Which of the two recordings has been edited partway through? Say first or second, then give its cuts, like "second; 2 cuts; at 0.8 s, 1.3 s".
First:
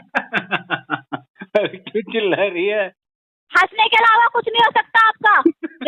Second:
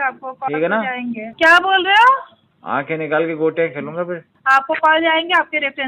second; 2 cuts; at 1.3 s, 4.3 s